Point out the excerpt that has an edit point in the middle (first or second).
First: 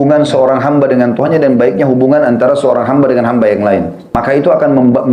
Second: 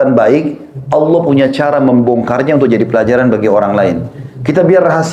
first